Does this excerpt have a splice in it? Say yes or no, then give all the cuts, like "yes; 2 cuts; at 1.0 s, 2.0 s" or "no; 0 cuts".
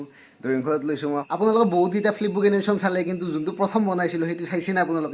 yes; 1 cut; at 1.2 s